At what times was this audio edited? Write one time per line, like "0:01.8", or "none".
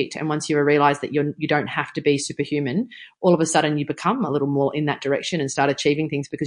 none